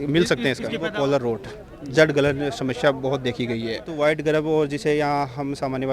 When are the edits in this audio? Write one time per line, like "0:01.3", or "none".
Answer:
0:00.9
0:03.9